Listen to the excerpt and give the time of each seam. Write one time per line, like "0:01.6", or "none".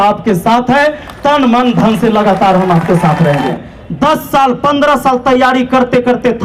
0:03.6